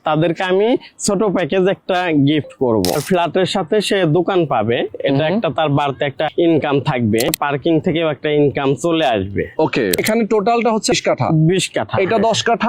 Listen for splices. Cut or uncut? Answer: cut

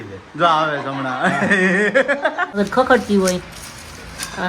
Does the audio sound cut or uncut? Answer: cut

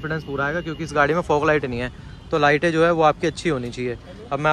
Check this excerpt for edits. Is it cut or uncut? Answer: uncut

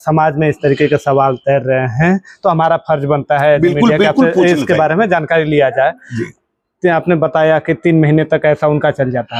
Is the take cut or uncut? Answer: uncut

